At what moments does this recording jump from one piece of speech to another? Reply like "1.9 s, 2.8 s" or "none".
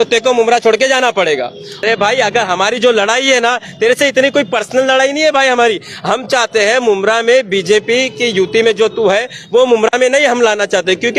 1.8 s